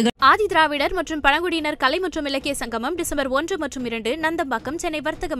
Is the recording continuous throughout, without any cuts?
yes; 0 cuts

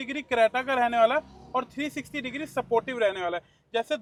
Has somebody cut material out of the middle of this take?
no; 0 cuts

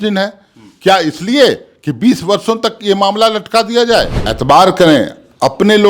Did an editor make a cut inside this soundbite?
yes; 1 cut; at 4.2 s

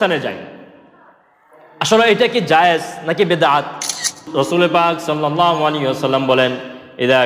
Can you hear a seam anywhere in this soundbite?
yes; 1 cut; at 4.2 s

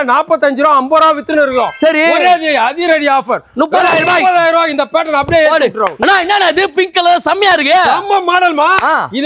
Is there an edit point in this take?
yes; 1 cut; at 5.9 s

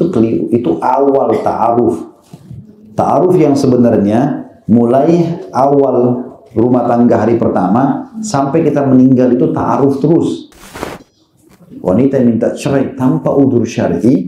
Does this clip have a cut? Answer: yes; 1 cut; at 11.0 s

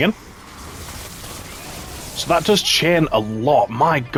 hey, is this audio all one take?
yes; 0 cuts

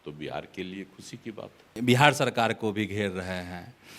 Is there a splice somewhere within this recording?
yes; 1 cut; at 1.7 s

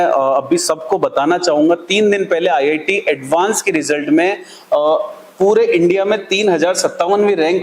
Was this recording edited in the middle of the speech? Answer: no; 0 cuts

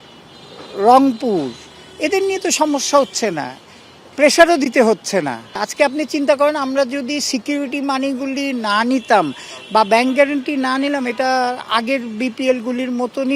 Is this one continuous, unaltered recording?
no; 1 cut; at 5.7 s

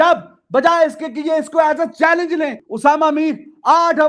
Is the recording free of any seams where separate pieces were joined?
no; 1 cut; at 2.6 s

